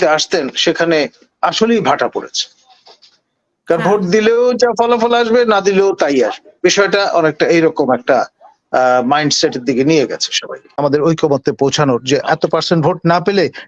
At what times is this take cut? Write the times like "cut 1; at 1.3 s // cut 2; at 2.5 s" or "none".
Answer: cut 1; at 10.6 s